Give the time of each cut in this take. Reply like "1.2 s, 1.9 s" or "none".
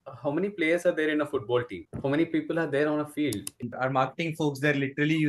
3.5 s